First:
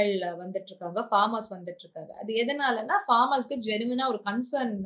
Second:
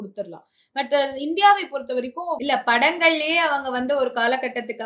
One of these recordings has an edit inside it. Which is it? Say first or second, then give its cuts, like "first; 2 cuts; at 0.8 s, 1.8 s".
second; 1 cut; at 2.4 s